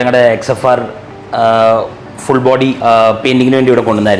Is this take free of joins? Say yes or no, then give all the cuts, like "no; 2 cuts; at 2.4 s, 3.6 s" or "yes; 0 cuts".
yes; 0 cuts